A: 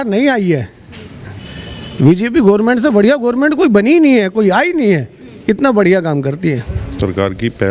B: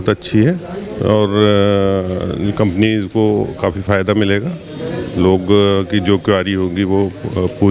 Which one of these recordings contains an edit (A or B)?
A